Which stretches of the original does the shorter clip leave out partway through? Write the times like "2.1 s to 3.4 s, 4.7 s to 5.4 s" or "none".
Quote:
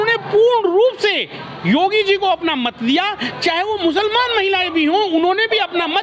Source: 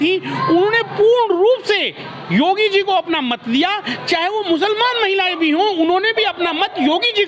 none